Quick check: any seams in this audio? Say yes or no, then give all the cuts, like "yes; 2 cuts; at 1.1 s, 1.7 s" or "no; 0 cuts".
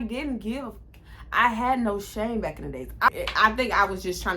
yes; 1 cut; at 3.1 s